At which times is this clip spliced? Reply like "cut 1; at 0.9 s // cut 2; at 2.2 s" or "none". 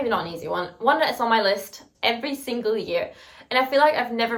none